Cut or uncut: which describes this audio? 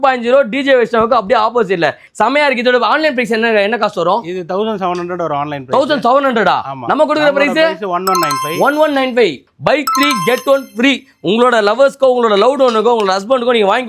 cut